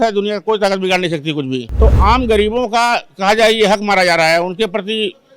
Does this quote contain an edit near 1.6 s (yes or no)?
yes